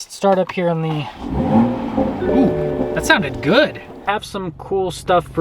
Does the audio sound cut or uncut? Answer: cut